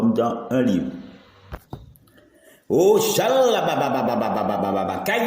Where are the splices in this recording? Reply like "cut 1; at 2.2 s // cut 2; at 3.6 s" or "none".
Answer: cut 1; at 1.5 s